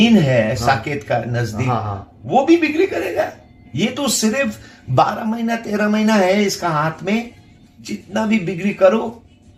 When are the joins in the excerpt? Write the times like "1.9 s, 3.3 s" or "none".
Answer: none